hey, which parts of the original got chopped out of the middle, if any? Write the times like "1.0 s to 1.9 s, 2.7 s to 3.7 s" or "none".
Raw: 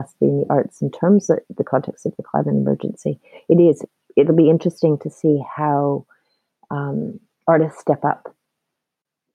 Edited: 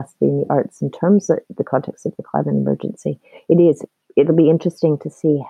none